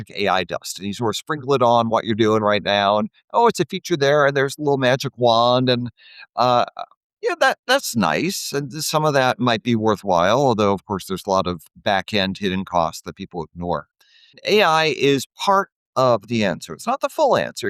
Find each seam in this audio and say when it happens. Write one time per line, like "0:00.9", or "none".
0:14.4